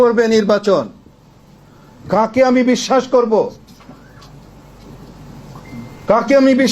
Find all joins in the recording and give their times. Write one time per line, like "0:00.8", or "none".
none